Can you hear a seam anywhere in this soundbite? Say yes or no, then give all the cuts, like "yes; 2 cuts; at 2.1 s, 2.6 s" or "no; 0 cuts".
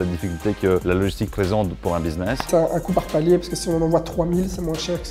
yes; 2 cuts; at 0.8 s, 2.5 s